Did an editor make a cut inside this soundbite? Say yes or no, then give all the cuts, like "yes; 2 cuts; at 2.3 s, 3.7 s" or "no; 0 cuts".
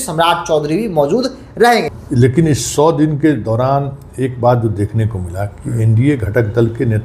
yes; 1 cut; at 1.9 s